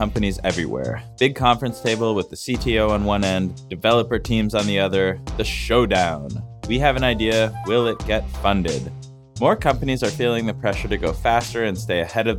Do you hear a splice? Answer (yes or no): yes